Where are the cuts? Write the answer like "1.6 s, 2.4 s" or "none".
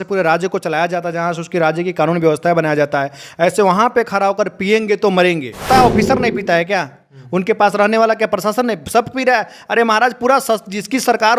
5.7 s